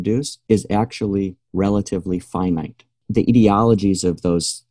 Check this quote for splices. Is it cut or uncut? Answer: cut